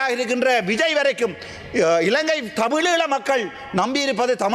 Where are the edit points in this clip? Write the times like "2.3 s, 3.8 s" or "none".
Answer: none